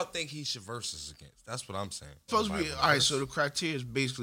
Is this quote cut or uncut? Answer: cut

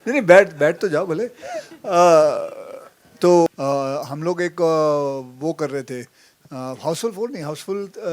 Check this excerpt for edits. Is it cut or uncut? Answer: cut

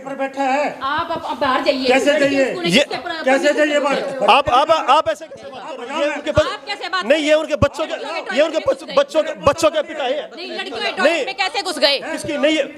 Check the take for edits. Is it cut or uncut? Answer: uncut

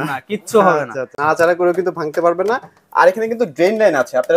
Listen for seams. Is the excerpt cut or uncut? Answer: cut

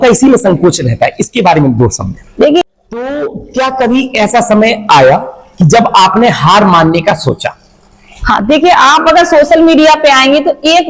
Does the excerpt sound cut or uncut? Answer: cut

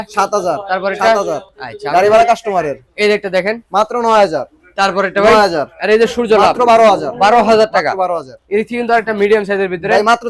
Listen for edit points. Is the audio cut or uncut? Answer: uncut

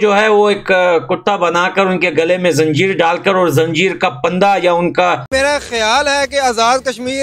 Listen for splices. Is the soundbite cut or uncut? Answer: cut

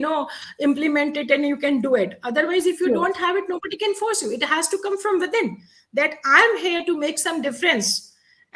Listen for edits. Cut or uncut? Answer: uncut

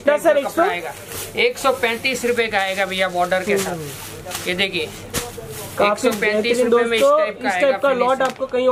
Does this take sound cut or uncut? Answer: uncut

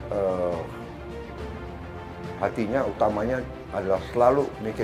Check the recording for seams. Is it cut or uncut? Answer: uncut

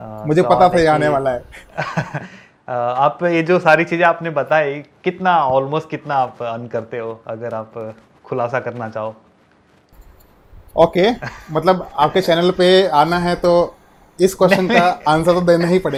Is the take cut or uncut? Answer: uncut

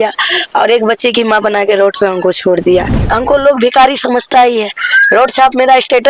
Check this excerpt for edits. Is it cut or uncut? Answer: cut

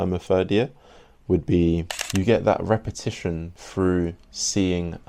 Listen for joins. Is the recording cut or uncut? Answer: cut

